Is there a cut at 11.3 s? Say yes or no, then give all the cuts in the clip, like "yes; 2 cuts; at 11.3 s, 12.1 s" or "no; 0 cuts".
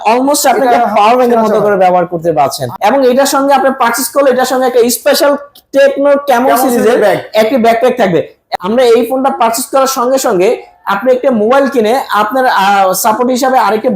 no; 2 cuts; at 2.7 s, 8.4 s